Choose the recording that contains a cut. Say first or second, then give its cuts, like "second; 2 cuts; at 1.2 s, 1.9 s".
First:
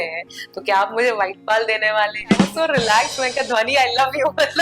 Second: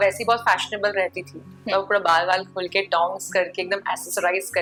first; 1 cut; at 2.5 s